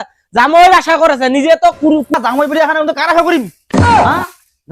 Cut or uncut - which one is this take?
cut